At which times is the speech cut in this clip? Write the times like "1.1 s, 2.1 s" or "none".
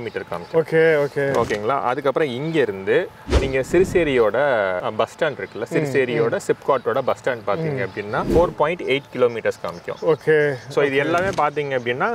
none